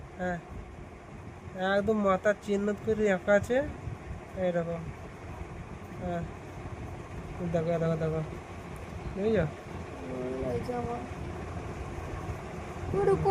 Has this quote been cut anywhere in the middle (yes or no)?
no